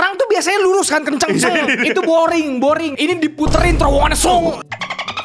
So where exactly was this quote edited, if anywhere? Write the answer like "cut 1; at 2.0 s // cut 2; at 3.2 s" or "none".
cut 1; at 2.9 s

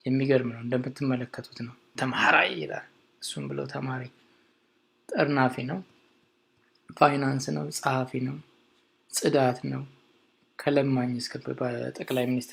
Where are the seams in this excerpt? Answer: none

